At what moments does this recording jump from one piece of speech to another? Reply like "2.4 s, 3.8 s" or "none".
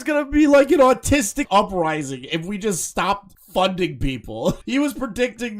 1.5 s, 4.6 s